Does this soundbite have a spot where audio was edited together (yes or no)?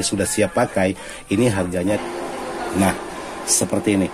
yes